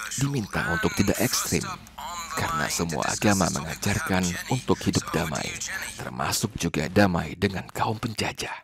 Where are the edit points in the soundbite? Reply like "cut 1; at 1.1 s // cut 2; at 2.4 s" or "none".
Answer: none

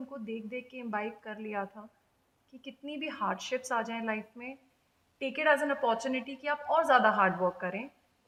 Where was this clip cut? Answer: none

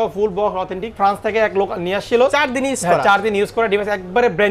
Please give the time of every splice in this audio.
cut 1; at 0.9 s

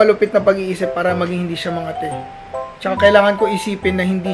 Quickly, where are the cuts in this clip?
none

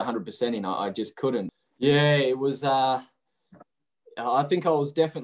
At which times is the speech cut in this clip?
cut 1; at 1.5 s

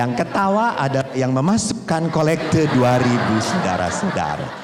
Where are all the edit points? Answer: none

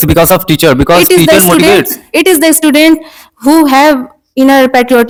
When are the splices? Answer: none

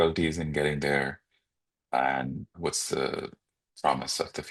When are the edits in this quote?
cut 1; at 2.5 s

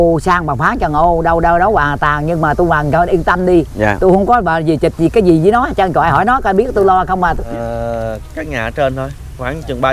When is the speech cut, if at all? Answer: cut 1; at 7.4 s

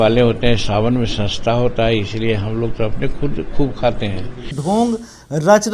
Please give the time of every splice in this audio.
cut 1; at 4.5 s

